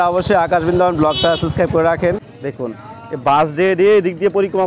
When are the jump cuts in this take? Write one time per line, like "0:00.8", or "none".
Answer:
0:02.3